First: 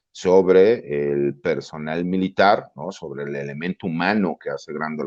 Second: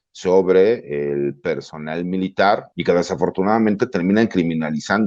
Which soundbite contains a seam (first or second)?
second